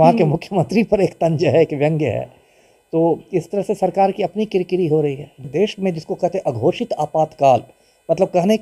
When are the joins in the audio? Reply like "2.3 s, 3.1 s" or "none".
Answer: 5.5 s